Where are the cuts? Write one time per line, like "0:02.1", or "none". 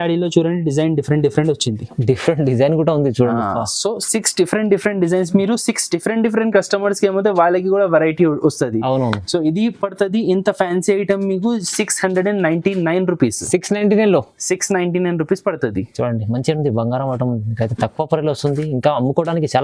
none